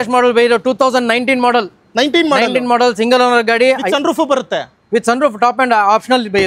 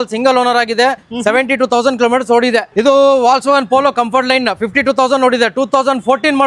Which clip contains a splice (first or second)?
second